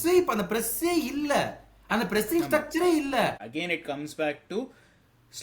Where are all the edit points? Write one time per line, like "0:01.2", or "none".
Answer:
0:03.5